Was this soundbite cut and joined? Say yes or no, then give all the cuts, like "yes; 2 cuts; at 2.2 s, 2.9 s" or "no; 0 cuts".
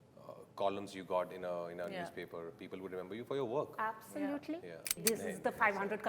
yes; 1 cut; at 5.0 s